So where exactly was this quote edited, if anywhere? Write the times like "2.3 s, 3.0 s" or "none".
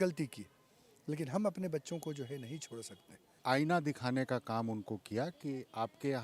3.4 s